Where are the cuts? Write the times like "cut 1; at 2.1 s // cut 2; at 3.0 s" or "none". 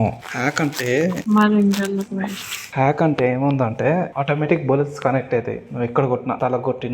cut 1; at 2.6 s